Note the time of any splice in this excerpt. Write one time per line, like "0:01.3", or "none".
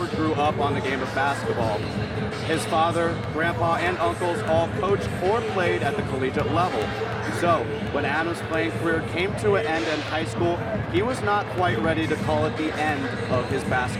none